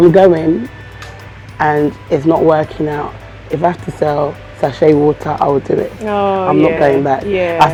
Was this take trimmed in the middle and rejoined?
no; 0 cuts

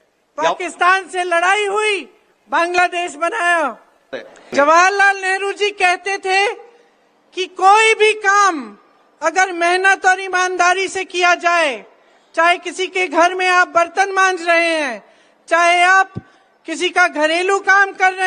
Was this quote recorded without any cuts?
no; 1 cut; at 4.2 s

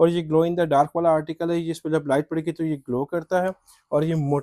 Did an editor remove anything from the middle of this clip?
no; 0 cuts

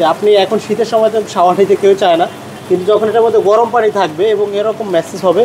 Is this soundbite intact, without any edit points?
yes; 0 cuts

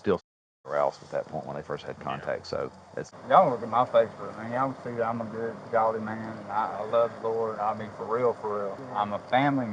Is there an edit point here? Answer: yes; 2 cuts; at 3.1 s, 8.8 s

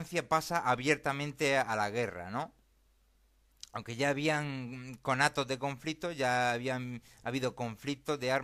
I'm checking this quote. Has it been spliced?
no; 0 cuts

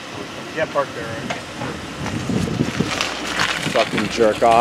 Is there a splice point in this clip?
no; 0 cuts

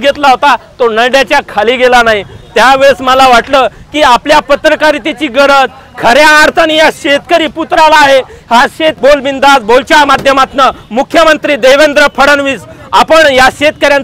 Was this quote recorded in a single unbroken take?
no; 1 cut; at 9.0 s

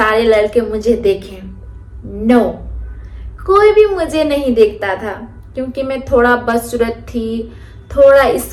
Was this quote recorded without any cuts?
yes; 0 cuts

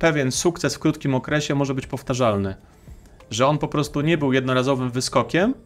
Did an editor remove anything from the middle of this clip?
no; 0 cuts

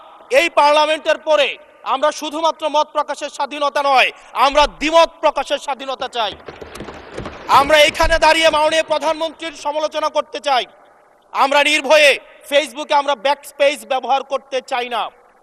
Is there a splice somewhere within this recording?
no; 0 cuts

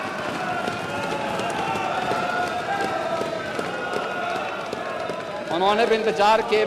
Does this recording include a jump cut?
no; 0 cuts

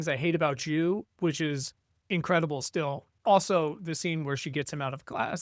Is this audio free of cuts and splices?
no; 1 cut; at 3.1 s

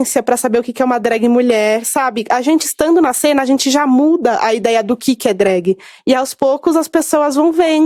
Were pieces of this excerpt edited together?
no; 0 cuts

